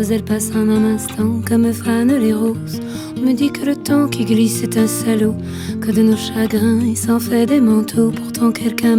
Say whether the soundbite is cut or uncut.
uncut